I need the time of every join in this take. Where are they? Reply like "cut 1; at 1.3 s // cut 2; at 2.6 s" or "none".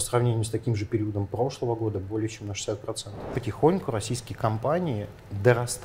cut 1; at 3.3 s